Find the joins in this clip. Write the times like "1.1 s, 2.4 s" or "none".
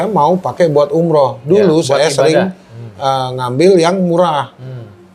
none